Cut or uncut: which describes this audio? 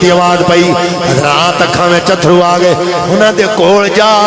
uncut